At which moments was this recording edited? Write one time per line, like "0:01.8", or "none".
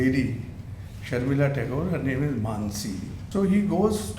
0:03.2